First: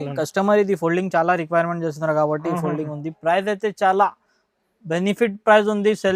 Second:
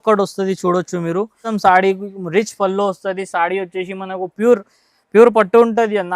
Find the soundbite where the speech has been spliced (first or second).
second